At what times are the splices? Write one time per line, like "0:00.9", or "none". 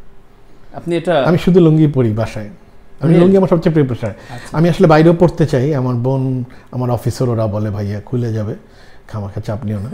none